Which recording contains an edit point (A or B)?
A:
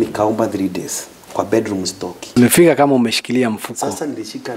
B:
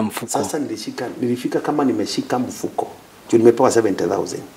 A